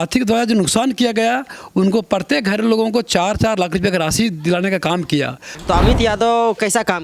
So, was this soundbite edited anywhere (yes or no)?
yes